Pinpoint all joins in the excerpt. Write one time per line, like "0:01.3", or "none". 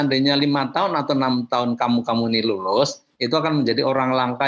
none